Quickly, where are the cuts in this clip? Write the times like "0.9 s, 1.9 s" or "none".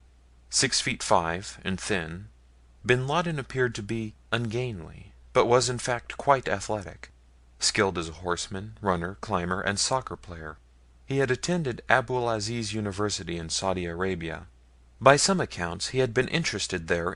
13.0 s